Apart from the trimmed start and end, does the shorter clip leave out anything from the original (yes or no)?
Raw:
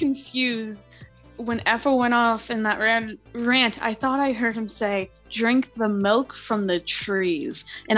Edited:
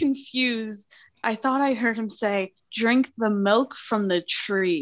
yes